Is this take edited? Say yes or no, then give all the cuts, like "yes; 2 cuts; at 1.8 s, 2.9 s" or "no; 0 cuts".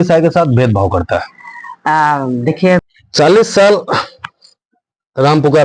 yes; 1 cut; at 2.8 s